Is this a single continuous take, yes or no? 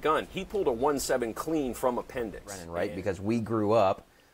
no